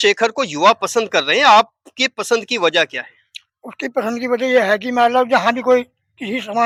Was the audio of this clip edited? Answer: no; 0 cuts

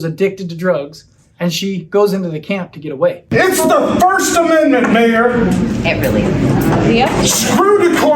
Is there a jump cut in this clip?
yes; 1 cut; at 3.2 s

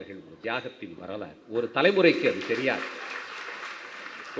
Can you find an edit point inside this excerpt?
no; 0 cuts

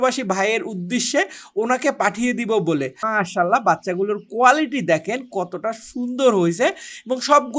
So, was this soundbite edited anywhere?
yes; 1 cut; at 3.0 s

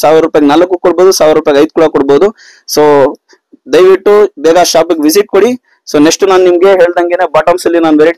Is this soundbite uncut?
yes; 0 cuts

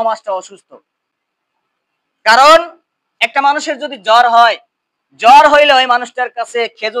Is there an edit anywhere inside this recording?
no; 0 cuts

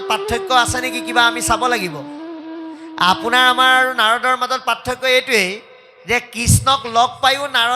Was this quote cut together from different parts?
no; 0 cuts

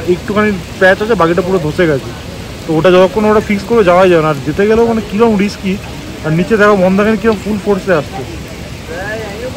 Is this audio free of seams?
yes; 0 cuts

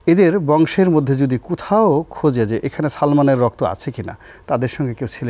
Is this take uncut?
yes; 0 cuts

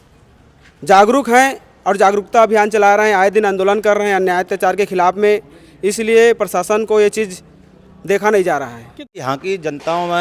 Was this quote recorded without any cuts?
no; 1 cut; at 9.1 s

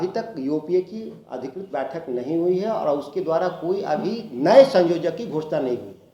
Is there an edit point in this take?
no; 0 cuts

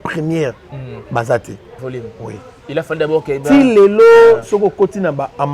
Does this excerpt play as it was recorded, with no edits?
no; 1 cut; at 1.8 s

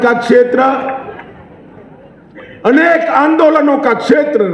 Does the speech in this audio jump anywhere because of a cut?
no; 0 cuts

